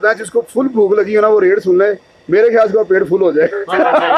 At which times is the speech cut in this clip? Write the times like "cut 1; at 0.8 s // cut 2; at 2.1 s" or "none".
none